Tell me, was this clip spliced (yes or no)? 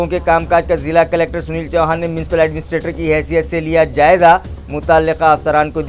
no